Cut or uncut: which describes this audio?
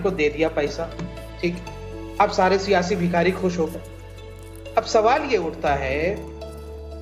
uncut